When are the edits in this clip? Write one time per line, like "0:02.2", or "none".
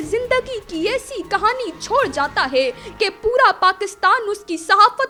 none